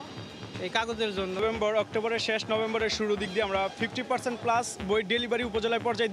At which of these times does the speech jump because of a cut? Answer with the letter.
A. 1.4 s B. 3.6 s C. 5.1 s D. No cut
A